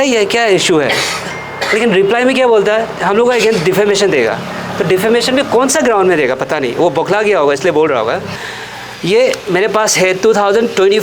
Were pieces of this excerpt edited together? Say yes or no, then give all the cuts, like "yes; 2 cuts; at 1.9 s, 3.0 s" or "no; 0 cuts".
yes; 1 cut; at 8.4 s